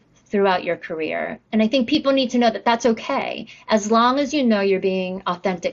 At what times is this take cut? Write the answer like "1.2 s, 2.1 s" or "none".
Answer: none